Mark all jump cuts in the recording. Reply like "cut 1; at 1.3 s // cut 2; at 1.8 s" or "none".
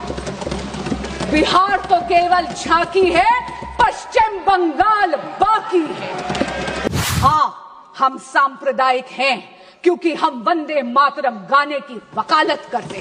cut 1; at 6.9 s